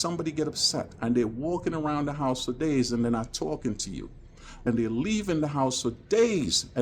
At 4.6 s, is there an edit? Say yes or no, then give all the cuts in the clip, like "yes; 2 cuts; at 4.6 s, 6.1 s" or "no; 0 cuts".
yes; 1 cut; at 4.6 s